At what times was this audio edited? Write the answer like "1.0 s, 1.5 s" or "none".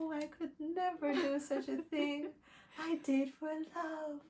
none